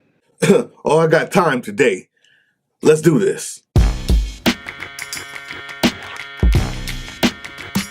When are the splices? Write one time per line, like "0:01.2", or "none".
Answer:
0:03.5